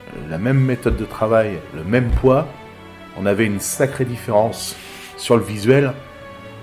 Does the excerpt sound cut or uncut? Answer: uncut